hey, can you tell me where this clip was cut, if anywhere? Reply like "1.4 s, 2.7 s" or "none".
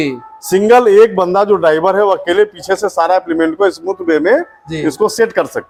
none